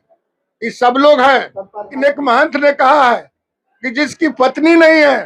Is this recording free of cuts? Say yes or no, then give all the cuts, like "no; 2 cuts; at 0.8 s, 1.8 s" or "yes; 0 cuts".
no; 1 cut; at 1.9 s